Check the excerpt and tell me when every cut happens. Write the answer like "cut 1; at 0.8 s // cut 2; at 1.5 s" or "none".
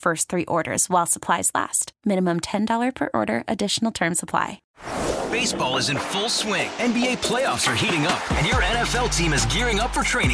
cut 1; at 4.6 s